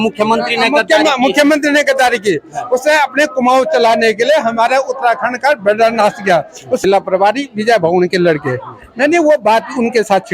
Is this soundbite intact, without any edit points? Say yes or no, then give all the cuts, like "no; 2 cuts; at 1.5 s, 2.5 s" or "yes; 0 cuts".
no; 1 cut; at 6.8 s